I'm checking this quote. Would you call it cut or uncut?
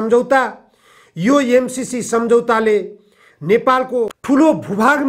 cut